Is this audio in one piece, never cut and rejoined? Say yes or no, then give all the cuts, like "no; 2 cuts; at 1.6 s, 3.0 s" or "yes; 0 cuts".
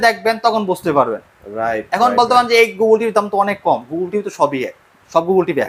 yes; 0 cuts